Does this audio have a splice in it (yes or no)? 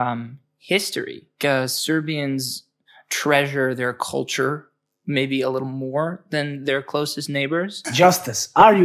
yes